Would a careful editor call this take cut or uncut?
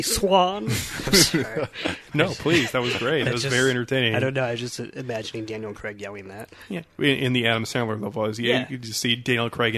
uncut